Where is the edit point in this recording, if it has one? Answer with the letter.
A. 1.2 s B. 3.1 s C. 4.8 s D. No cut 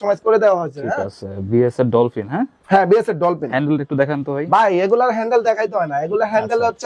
D